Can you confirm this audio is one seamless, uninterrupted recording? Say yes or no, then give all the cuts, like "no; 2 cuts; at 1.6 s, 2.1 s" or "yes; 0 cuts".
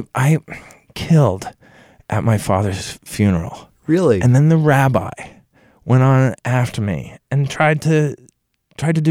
yes; 0 cuts